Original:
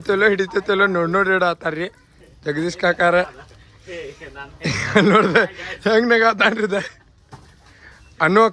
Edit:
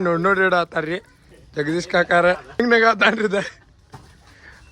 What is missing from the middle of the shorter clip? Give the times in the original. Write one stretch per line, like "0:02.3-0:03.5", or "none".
0:03.5-0:06.0